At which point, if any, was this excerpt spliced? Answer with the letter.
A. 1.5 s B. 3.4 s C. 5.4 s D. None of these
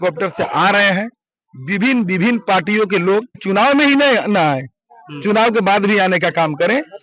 B